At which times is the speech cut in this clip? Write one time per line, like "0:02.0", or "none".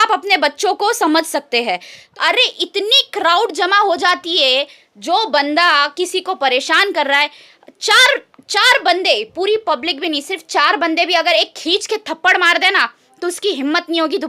0:02.0